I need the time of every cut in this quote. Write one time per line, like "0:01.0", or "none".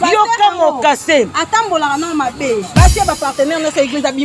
none